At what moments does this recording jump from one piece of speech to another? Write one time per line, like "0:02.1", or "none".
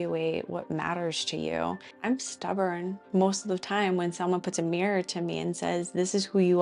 0:02.0
0:03.0